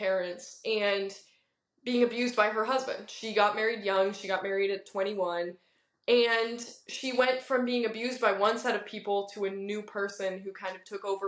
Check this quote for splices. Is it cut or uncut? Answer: uncut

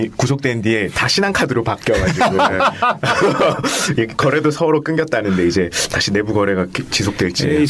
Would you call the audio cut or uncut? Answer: uncut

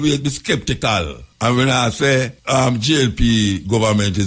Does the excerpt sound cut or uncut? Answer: cut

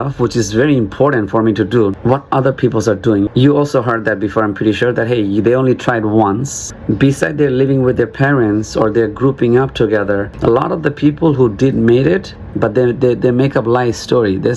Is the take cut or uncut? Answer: cut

